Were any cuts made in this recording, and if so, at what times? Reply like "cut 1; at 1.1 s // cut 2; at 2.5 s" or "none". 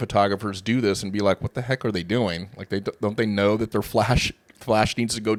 none